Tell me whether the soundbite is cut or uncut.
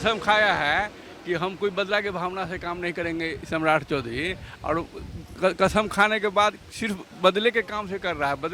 uncut